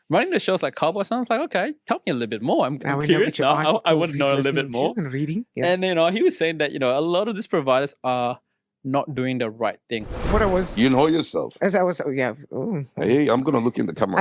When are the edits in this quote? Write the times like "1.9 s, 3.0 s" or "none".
10.2 s